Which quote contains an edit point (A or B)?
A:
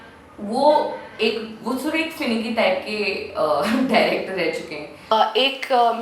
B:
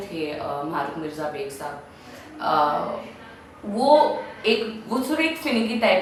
A